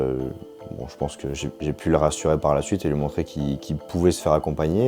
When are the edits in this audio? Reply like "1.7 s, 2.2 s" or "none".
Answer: none